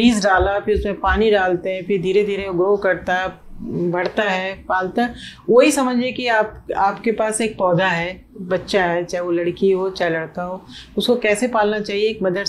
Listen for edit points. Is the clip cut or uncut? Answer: uncut